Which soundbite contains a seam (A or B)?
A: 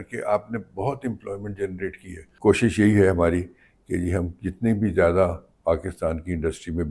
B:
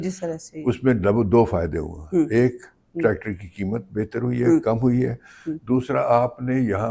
A